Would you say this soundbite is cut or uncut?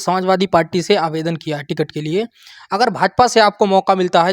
uncut